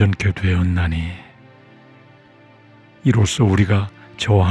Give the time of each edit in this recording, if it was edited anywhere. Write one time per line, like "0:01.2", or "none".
0:01.5
0:03.0

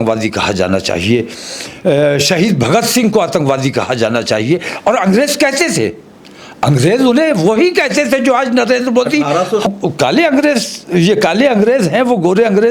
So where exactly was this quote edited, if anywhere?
0:09.7

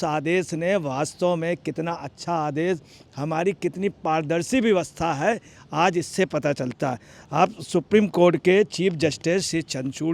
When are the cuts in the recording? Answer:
none

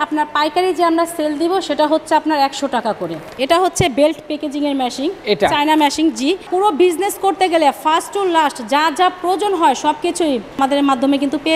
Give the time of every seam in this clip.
0:03.3
0:06.5
0:10.6

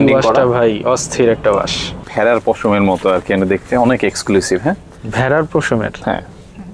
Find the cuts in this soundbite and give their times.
0:02.1

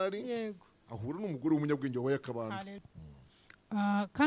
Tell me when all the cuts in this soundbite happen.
0:02.8

